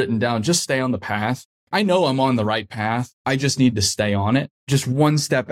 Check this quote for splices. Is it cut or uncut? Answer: cut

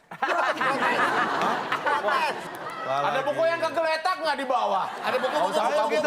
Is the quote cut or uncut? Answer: cut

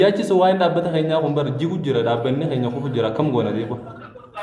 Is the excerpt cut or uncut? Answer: uncut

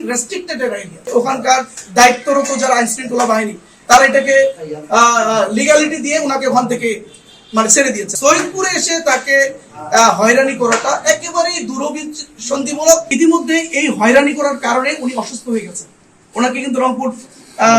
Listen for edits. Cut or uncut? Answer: cut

